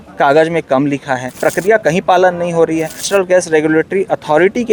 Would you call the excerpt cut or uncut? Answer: cut